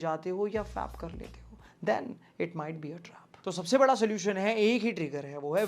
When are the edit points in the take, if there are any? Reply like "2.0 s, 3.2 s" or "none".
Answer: none

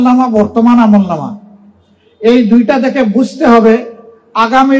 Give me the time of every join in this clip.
none

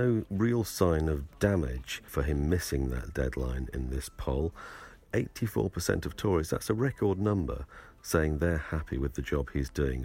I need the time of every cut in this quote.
2.0 s, 5.1 s

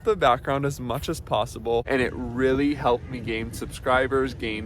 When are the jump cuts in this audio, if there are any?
1.9 s

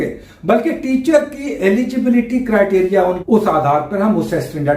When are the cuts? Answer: 3.2 s

